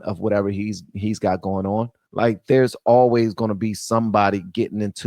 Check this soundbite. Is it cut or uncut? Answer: cut